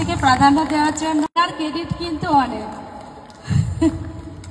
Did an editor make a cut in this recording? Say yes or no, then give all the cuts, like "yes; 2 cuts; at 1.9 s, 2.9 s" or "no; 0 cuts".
yes; 1 cut; at 1.4 s